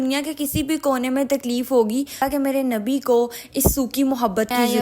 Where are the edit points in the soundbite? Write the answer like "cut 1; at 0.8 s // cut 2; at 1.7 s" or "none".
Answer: cut 1; at 2.1 s